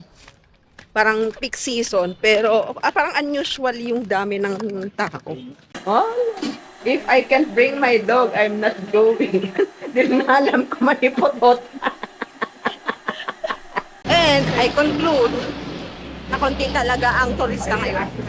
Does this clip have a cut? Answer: yes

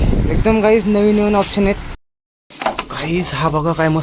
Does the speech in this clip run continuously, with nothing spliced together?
no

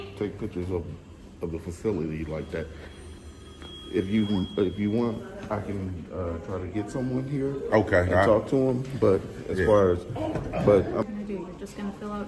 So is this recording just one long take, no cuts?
no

